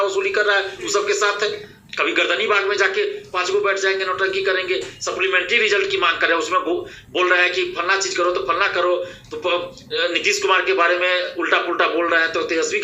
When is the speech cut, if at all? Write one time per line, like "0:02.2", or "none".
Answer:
0:01.7

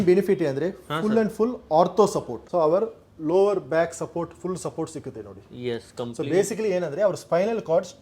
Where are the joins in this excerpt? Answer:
0:02.4

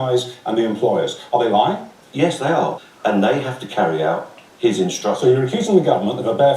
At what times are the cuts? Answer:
0:02.7

